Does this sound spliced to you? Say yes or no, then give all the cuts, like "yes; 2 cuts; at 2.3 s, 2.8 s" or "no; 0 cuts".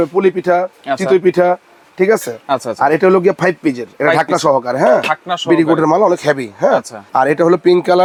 no; 0 cuts